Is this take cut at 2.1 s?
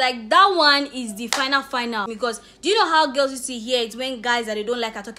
yes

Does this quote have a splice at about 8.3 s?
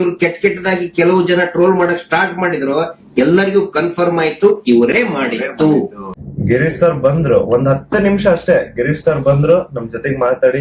no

